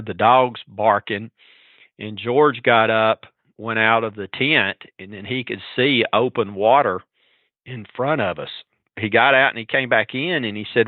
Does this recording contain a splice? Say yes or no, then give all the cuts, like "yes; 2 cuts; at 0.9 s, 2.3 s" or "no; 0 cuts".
yes; 1 cut; at 8.8 s